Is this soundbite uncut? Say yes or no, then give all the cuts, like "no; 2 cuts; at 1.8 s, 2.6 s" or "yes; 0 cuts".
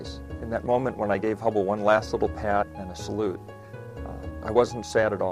yes; 0 cuts